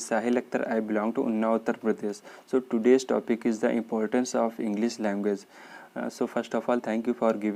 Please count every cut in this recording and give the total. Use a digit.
0